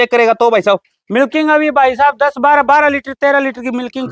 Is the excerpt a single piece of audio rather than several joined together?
yes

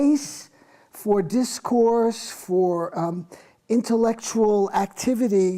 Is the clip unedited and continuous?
no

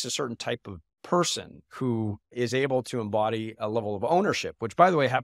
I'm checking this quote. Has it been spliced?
yes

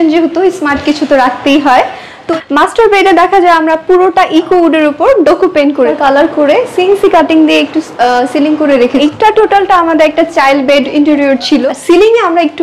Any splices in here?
yes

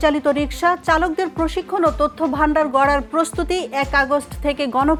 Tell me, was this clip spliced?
no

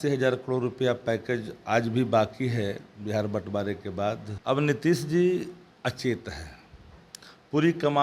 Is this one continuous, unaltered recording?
no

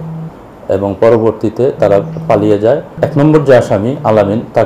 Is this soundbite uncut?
no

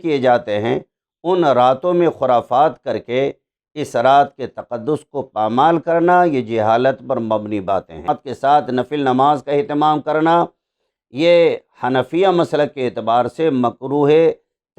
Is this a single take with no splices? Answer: no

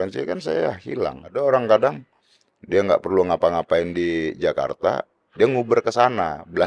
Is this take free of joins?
no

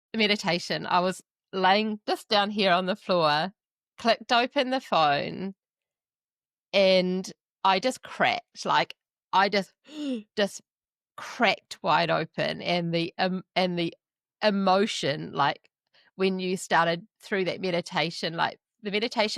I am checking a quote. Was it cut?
no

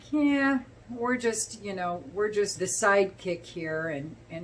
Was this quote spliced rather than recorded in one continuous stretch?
yes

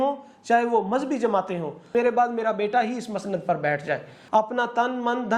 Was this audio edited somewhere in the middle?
yes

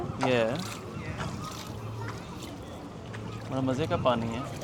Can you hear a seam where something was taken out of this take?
no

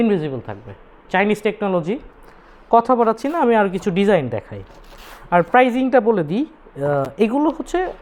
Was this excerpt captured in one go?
yes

